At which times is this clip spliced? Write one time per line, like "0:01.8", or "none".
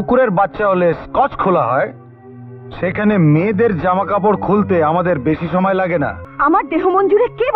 0:06.2